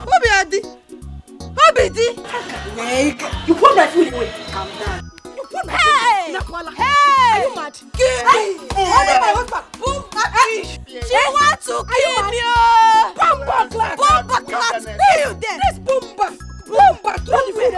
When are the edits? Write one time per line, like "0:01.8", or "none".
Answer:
none